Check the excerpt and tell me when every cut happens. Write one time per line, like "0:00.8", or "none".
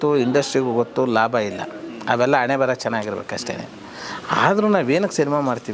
none

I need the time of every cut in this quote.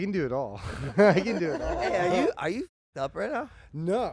none

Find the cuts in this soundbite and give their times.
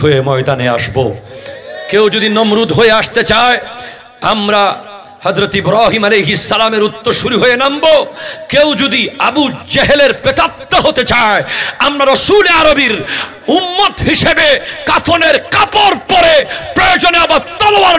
none

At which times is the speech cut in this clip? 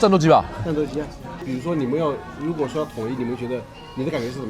0:01.5

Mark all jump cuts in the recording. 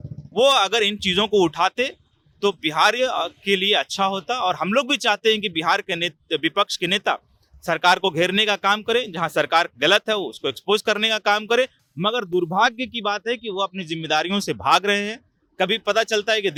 none

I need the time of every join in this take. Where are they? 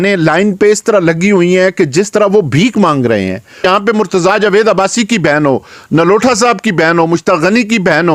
0:03.6

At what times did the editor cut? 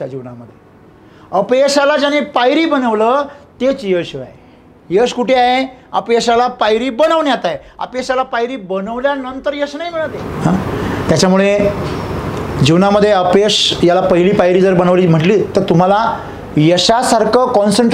0:10.2

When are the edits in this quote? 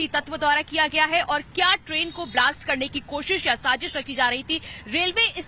0:03.2

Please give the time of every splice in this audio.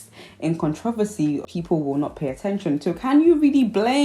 0:01.5

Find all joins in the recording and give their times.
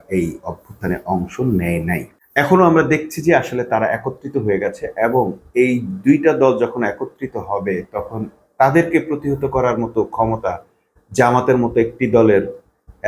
0:02.1

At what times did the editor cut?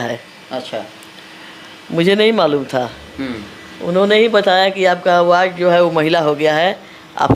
none

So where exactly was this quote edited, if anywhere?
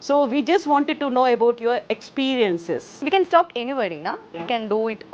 0:03.0

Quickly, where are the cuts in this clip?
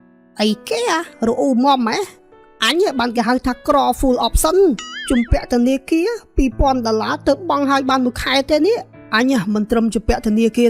0:08.9

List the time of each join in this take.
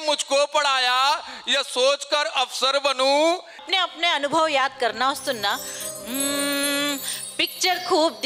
0:03.7

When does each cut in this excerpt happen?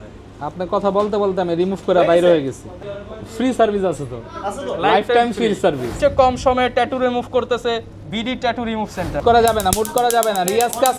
0:02.7
0:05.9
0:09.2

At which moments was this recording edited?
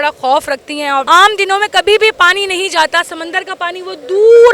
0:01.0

